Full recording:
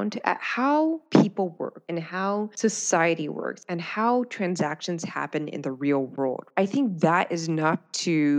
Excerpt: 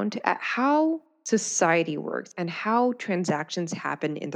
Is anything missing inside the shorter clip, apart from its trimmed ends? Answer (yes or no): yes